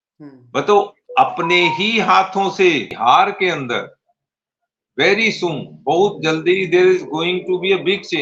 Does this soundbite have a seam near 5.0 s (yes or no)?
no